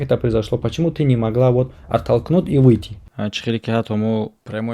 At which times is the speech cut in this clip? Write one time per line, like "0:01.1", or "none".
0:03.1